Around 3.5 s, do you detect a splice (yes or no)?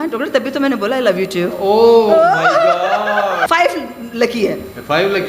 yes